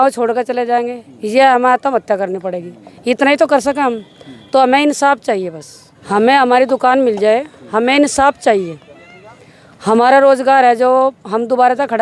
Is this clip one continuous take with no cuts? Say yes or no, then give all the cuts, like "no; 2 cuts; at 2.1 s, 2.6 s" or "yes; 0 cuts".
yes; 0 cuts